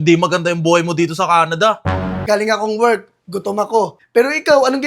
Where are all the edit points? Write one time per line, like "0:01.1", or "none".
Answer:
0:02.2
0:04.0